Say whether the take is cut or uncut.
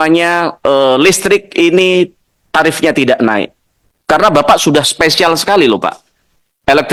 uncut